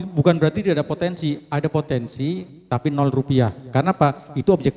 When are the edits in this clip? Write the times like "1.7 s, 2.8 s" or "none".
none